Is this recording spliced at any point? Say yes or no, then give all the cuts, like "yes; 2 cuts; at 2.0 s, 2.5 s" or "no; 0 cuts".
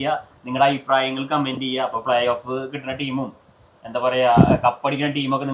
no; 0 cuts